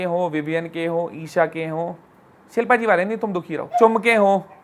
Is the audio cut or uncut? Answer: cut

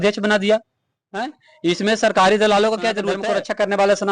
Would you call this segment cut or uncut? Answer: cut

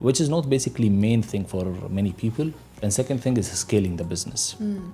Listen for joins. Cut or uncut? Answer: uncut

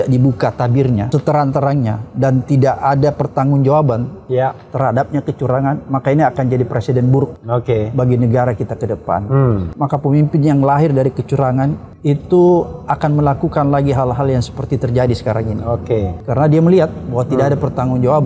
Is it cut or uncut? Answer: cut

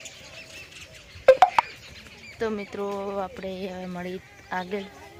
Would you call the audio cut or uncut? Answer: uncut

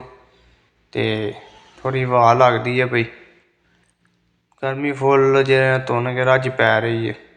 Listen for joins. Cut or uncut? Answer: uncut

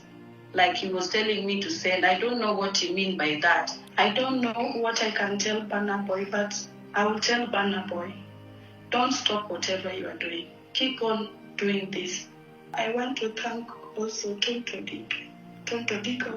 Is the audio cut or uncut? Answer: cut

